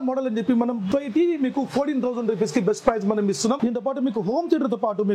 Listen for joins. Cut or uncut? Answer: cut